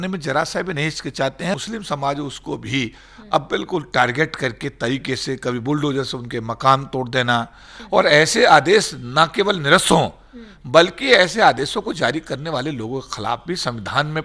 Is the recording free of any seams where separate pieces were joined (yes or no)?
no